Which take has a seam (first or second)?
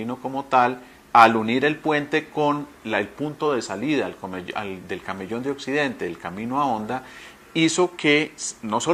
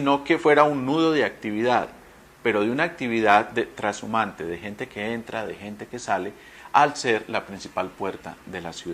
second